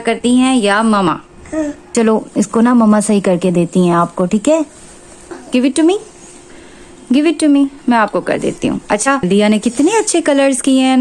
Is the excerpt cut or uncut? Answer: cut